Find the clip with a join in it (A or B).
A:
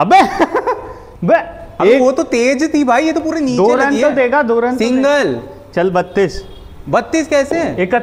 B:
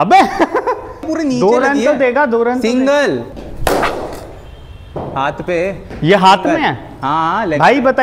B